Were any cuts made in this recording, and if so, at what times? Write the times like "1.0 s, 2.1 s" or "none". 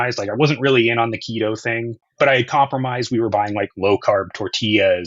2.0 s